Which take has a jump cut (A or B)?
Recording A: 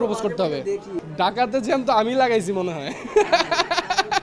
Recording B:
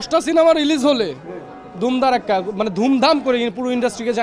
A